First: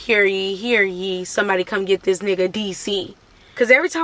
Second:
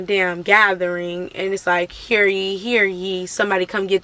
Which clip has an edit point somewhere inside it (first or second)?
first